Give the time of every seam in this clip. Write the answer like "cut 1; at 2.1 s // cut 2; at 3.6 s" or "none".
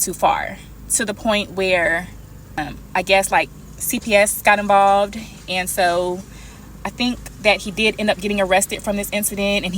cut 1; at 2.6 s